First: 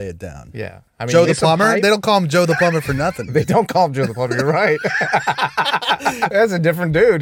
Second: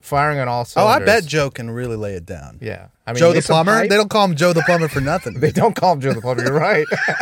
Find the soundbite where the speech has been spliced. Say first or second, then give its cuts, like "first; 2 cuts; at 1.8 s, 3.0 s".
first; 1 cut; at 6.3 s